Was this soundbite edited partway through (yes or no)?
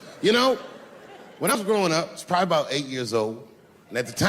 yes